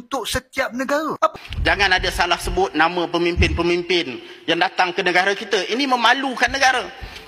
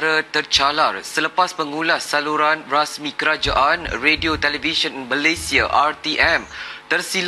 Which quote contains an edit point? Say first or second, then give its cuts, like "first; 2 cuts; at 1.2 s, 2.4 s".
first; 1 cut; at 1.4 s